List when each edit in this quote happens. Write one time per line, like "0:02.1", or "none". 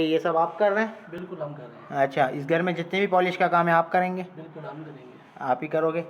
none